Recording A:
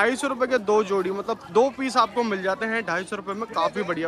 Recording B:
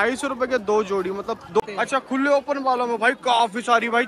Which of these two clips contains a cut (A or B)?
B